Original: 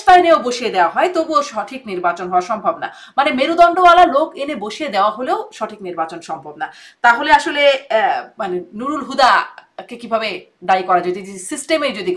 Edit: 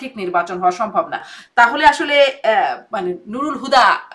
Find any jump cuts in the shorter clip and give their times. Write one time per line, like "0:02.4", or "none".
0:01.3